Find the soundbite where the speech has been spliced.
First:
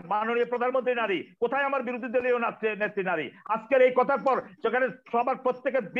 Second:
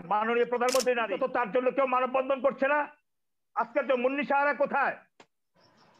second; 1 cut; at 1.1 s

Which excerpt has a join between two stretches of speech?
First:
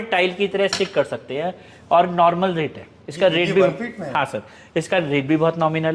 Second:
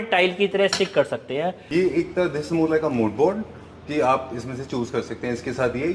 second; 1 cut; at 1.6 s

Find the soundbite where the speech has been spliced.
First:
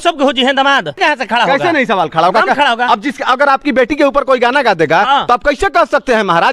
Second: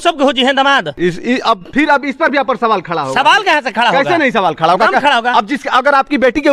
first; 1 cut; at 1.0 s

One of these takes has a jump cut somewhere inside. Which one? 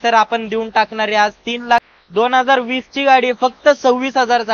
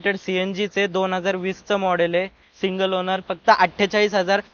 first; 1 cut; at 1.8 s

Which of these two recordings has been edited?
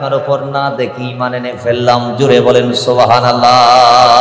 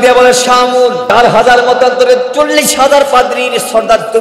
second; 1 cut; at 1.1 s

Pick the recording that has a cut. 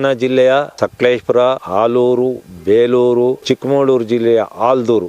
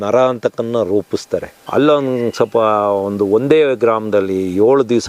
second; 1 cut; at 1.6 s

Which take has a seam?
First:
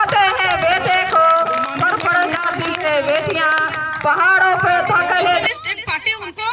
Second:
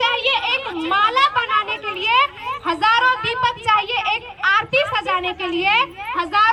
first; 1 cut; at 5.4 s

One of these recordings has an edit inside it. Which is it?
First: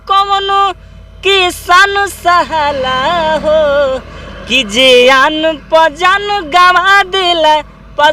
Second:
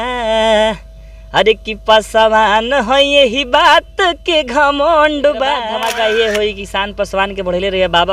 second; 1 cut; at 5.7 s

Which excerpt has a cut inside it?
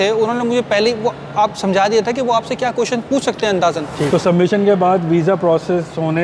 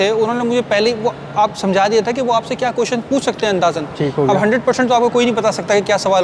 first; 1 cut; at 4.1 s

